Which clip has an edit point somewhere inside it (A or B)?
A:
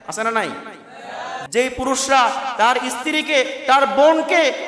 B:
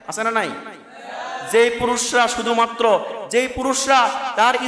A